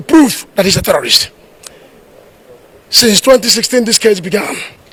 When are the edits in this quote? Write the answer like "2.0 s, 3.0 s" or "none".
none